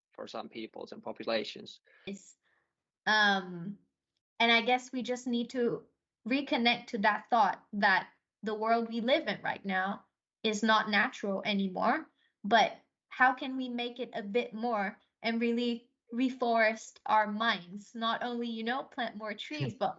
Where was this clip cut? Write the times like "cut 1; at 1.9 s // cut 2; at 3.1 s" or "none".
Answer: cut 1; at 2.2 s